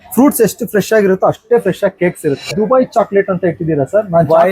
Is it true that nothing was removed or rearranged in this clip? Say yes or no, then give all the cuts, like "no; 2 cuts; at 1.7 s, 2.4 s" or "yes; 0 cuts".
no; 1 cut; at 2.4 s